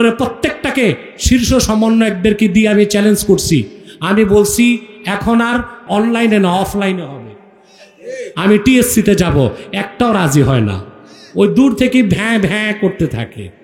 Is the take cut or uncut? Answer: cut